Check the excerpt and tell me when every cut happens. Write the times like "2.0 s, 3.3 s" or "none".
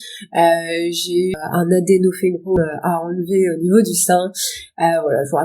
1.3 s, 2.6 s